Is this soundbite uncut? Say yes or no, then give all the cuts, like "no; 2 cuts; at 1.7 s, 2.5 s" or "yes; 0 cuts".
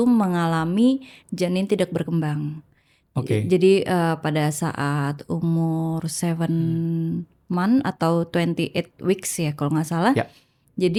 yes; 0 cuts